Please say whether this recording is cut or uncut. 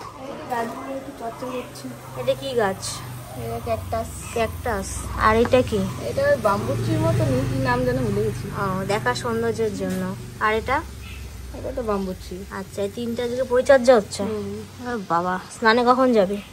uncut